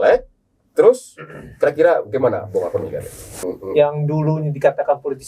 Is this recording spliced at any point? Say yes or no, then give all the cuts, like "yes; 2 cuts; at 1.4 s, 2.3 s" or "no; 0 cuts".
yes; 1 cut; at 3.5 s